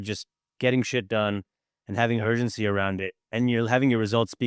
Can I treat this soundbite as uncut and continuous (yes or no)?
yes